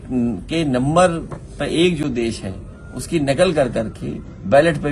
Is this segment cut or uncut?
uncut